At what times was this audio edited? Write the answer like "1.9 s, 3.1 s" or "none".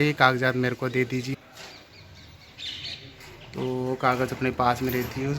1.3 s